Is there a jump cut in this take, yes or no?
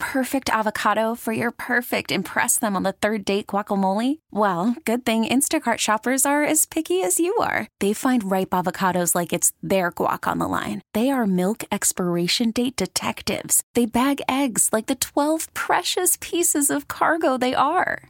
no